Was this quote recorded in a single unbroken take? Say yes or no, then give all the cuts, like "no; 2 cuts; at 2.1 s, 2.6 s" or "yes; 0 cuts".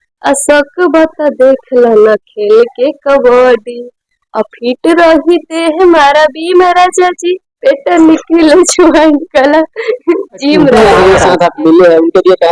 no; 1 cut; at 10.7 s